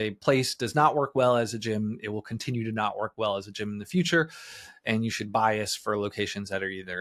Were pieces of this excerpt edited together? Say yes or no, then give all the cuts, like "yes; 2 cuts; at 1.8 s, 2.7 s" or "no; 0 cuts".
no; 0 cuts